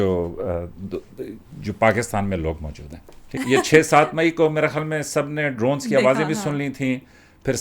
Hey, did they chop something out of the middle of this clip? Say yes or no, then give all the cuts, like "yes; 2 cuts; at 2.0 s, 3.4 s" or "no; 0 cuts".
yes; 1 cut; at 3.3 s